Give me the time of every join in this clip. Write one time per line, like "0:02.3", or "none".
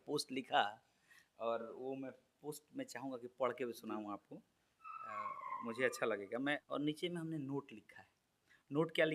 0:06.6